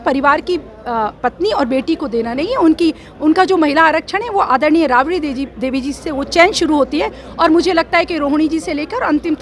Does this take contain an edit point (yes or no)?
no